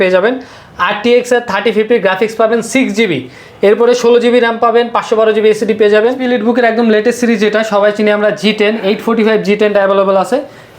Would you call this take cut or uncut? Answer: cut